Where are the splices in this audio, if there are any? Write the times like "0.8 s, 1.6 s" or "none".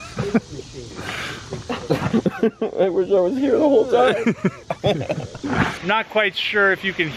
5.7 s